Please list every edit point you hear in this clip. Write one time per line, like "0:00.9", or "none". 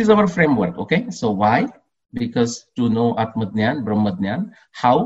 none